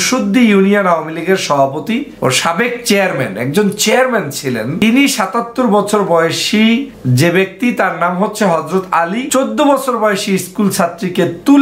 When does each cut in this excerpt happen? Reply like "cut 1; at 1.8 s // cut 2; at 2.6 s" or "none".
cut 1; at 2.1 s // cut 2; at 4.8 s // cut 3; at 7.0 s // cut 4; at 9.3 s